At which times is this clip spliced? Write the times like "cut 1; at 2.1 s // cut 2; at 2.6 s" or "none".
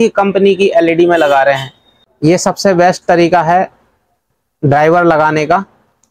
none